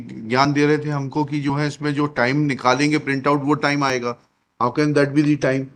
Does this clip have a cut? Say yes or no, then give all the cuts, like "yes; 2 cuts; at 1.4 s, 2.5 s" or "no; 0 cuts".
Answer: no; 0 cuts